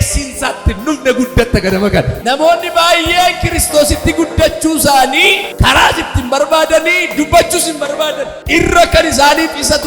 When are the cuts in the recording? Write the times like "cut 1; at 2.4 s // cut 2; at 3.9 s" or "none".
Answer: cut 1; at 2.1 s // cut 2; at 5.5 s // cut 3; at 8.3 s